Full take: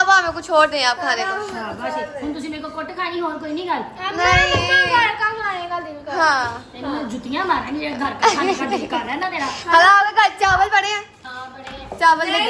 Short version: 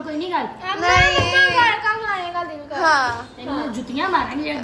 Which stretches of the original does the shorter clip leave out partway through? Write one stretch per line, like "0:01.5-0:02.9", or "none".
none